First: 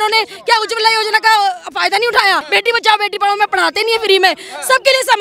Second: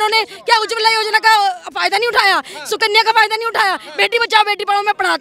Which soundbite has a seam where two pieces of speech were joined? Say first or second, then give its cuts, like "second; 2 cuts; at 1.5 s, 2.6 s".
first; 1 cut; at 2.4 s